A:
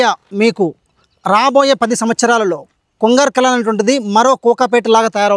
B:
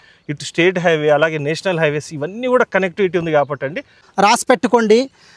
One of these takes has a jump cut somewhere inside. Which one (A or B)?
B